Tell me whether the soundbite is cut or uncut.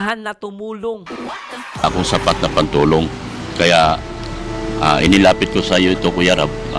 cut